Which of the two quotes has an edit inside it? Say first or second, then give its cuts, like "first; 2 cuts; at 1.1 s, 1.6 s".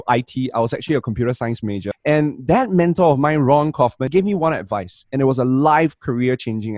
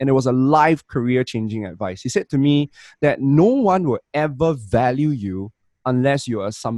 first; 2 cuts; at 1.9 s, 4.1 s